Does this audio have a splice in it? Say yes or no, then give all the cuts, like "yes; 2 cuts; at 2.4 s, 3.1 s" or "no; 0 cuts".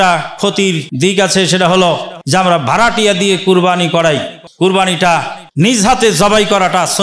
yes; 4 cuts; at 0.9 s, 2.1 s, 4.4 s, 5.8 s